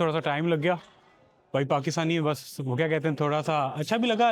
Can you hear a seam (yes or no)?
no